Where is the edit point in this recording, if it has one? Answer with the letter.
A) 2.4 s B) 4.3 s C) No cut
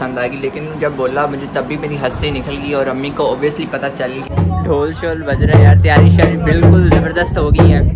B